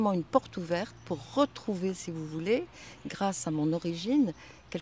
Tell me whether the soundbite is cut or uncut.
uncut